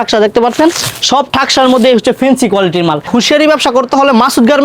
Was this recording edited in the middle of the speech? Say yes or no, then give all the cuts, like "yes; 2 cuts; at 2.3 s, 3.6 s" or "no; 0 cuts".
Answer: yes; 1 cut; at 3.1 s